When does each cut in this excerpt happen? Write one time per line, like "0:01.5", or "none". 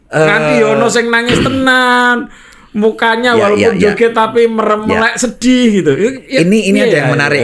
none